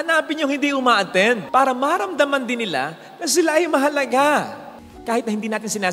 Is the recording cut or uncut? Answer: cut